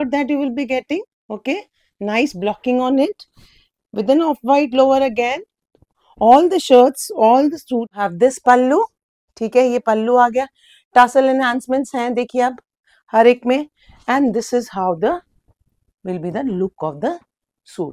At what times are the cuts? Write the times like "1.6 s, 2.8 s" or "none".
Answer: 7.9 s